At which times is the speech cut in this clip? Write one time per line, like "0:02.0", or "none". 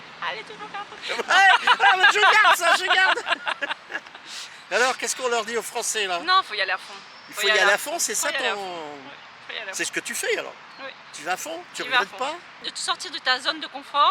0:12.7